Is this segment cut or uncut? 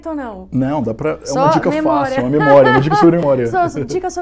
uncut